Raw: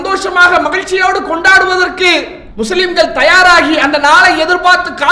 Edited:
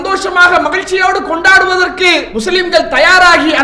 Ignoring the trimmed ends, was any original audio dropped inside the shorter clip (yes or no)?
yes